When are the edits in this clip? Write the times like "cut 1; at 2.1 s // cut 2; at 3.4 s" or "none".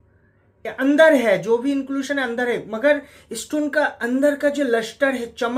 none